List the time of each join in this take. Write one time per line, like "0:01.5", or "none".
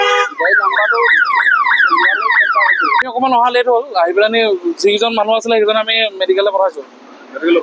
0:03.0